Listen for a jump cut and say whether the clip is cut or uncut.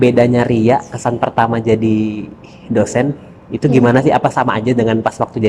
uncut